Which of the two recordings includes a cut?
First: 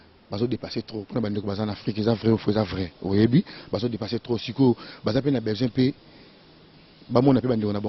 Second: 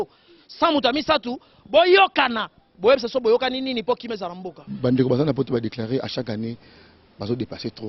second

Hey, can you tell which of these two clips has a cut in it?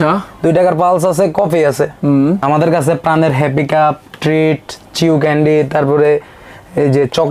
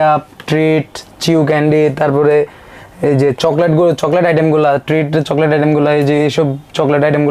first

